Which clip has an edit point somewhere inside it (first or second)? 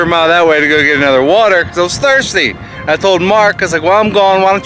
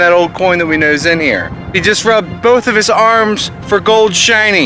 second